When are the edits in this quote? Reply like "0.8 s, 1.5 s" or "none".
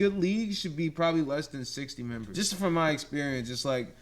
2.2 s